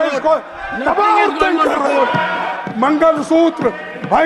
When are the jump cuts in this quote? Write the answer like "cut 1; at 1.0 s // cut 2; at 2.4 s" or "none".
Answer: cut 1; at 2.6 s